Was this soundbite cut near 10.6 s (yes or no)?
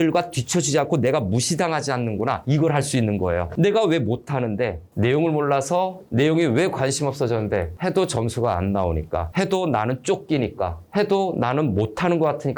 no